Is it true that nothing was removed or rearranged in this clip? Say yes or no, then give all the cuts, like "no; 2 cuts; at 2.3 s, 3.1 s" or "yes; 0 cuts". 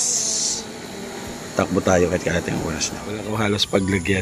no; 1 cut; at 3.2 s